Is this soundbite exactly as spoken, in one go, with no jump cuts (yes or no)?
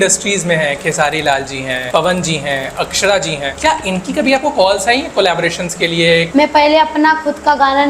no